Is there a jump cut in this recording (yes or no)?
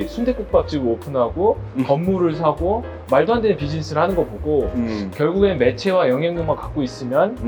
no